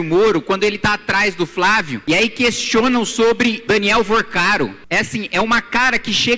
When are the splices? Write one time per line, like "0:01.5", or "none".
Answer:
0:01.9
0:03.6
0:04.8